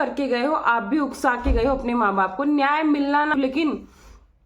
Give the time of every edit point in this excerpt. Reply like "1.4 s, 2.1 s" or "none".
3.3 s